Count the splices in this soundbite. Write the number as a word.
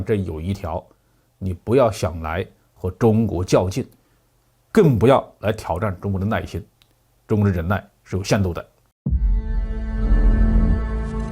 one